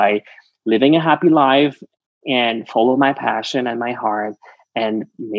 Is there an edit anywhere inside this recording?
no; 0 cuts

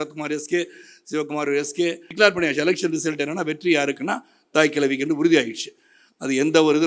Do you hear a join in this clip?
yes; 1 cut; at 2.2 s

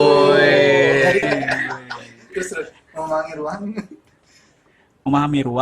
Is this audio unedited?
no; 1 cut; at 1.2 s

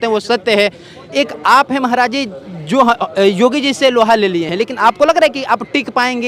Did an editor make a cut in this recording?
no; 0 cuts

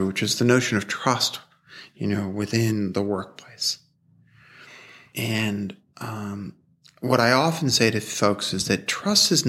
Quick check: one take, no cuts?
no; 1 cut; at 5.0 s

